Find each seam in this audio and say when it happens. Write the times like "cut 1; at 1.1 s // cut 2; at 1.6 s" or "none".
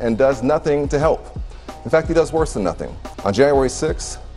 cut 1; at 3.1 s